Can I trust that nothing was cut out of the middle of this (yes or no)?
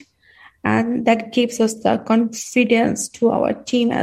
yes